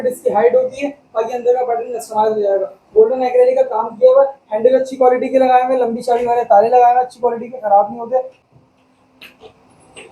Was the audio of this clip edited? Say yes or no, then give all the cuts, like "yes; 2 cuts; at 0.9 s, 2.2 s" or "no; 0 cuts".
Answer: yes; 1 cut; at 8.3 s